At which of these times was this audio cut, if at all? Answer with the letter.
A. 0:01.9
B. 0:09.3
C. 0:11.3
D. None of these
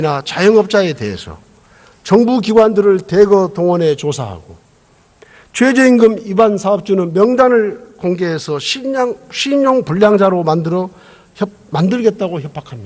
A